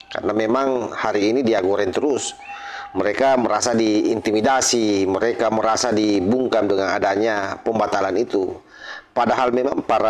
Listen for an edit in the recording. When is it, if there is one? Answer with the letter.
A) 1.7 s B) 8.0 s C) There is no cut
C